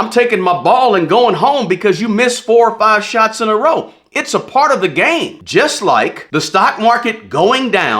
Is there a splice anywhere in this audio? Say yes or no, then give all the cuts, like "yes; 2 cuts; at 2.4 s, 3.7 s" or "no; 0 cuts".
yes; 2 cuts; at 5.4 s, 6.2 s